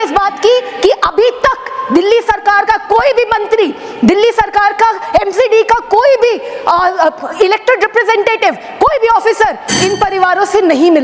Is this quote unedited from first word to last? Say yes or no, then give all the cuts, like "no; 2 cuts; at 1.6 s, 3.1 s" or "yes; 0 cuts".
yes; 0 cuts